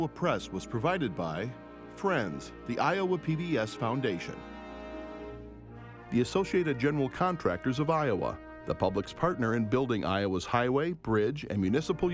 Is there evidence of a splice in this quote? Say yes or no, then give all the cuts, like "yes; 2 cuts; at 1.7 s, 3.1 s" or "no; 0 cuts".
yes; 2 cuts; at 4.3 s, 6.1 s